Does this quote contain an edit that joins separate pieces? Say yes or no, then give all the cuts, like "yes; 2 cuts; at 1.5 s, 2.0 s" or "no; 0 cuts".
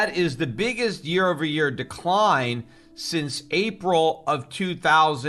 no; 0 cuts